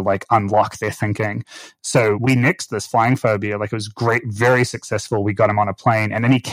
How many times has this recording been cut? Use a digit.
1